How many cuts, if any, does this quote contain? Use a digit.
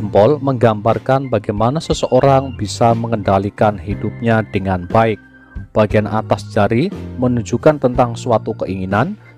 0